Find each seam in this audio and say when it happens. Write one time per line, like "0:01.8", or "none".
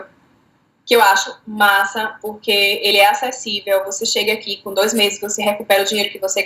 none